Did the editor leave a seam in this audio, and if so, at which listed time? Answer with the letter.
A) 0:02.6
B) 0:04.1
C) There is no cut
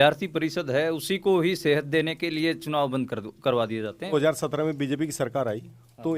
B